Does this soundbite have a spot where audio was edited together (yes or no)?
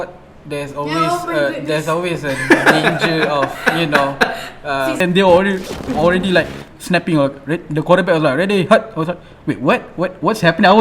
yes